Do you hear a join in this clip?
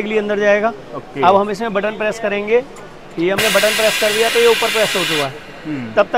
no; 0 cuts

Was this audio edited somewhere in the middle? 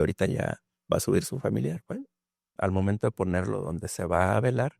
yes; 1 cut; at 2.5 s

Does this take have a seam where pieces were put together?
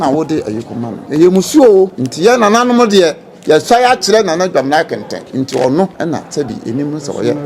yes; 4 cuts; at 1.0 s, 2.0 s, 5.2 s, 5.9 s

